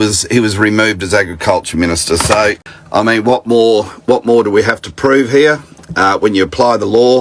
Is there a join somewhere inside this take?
yes; 1 cut; at 2.6 s

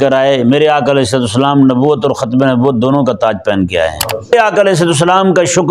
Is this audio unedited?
no; 1 cut; at 4.3 s

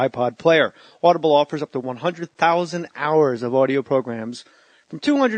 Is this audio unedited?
no; 1 cut; at 2.5 s

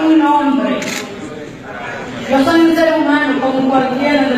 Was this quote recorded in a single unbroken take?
no; 1 cut; at 1.0 s

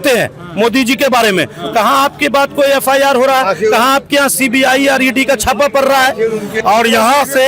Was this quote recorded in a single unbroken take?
no; 1 cut; at 6.5 s

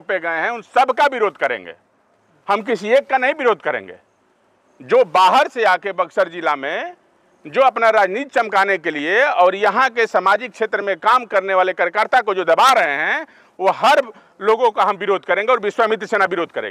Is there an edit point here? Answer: no; 0 cuts

